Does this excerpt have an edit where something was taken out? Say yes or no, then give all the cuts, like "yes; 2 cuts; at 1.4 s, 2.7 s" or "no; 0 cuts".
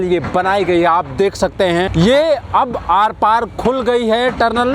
yes; 1 cut; at 1.9 s